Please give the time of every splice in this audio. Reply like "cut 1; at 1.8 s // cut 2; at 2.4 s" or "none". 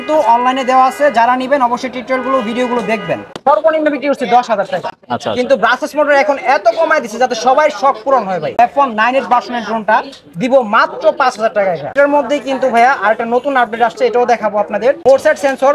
cut 1; at 3.4 s // cut 2; at 8.6 s // cut 3; at 11.9 s // cut 4; at 15.0 s